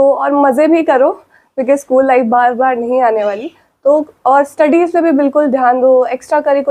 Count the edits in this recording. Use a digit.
0